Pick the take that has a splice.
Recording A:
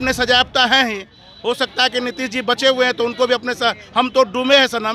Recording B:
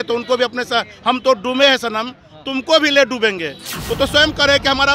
B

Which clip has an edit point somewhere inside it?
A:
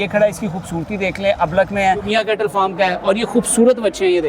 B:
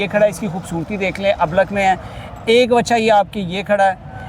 A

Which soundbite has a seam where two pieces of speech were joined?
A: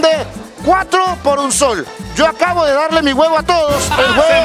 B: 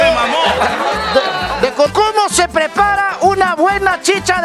B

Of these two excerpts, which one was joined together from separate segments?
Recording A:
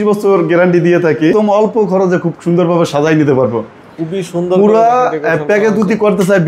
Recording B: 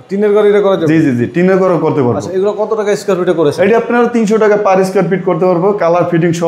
A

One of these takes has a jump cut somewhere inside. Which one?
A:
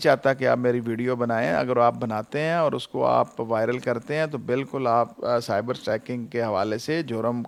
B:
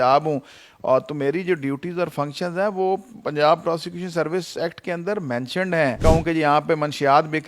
B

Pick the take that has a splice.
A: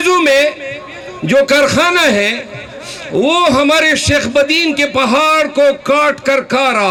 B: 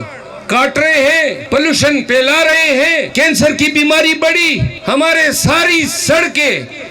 B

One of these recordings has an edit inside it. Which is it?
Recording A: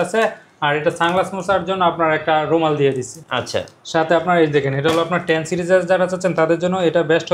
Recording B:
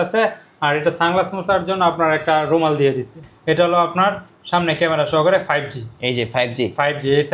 B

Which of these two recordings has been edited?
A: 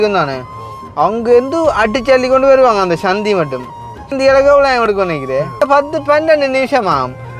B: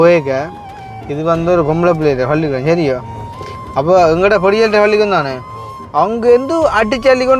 A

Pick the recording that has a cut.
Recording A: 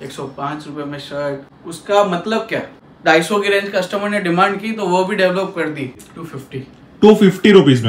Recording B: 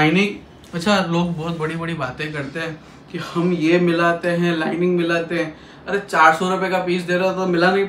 A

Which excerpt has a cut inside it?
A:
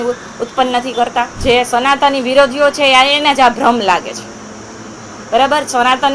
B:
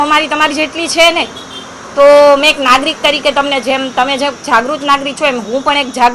A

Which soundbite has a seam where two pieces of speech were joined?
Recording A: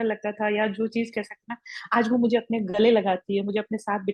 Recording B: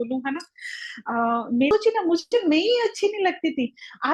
B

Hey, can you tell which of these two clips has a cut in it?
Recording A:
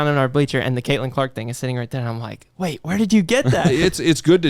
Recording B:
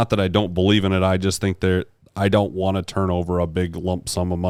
A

